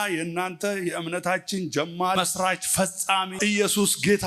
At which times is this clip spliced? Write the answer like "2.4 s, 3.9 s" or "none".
2.2 s, 3.3 s